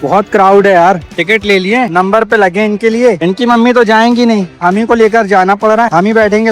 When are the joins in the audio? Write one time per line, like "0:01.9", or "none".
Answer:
0:01.1